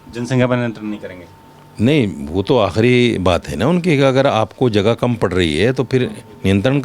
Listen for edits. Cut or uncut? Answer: uncut